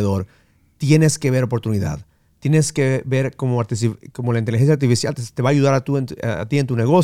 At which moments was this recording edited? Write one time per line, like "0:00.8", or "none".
none